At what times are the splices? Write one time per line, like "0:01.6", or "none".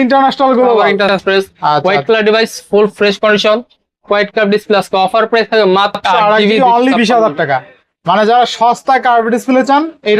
0:01.2
0:06.0